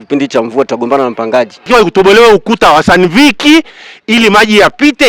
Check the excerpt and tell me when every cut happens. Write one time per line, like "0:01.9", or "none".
0:01.6